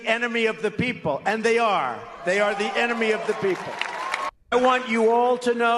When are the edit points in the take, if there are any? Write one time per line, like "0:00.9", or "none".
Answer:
0:04.4